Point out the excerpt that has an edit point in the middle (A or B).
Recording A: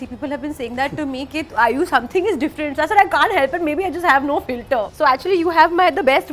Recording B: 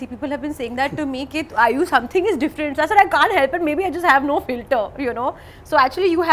A